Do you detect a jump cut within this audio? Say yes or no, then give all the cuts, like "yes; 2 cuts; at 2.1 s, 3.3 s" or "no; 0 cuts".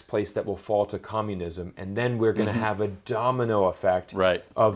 no; 0 cuts